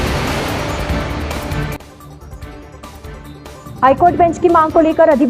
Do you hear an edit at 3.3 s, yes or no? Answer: yes